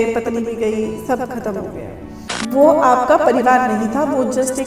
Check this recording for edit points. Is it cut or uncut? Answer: cut